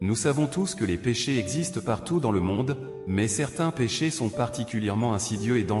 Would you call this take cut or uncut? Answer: uncut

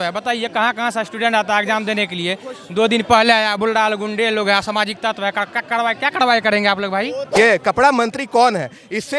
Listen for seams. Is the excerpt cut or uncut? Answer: cut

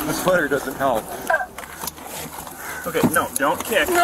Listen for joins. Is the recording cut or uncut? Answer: cut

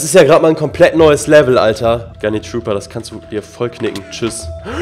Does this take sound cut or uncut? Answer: cut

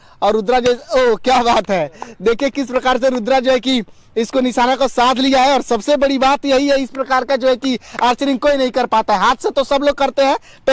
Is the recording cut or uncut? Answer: uncut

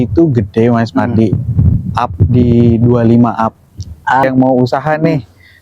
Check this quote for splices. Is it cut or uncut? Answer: cut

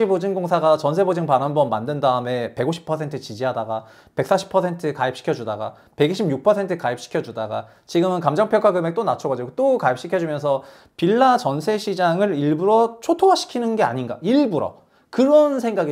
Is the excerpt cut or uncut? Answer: uncut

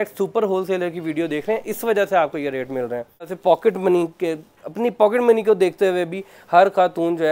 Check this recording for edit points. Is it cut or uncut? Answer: cut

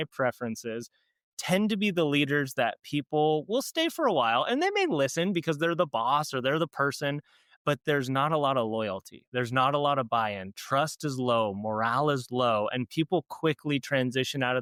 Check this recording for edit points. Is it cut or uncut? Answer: uncut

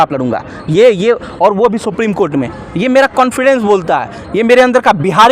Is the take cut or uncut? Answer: uncut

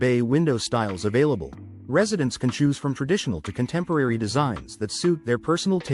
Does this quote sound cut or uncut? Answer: uncut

